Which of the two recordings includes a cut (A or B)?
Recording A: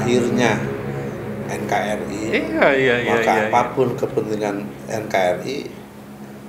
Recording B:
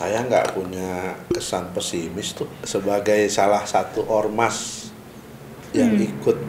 B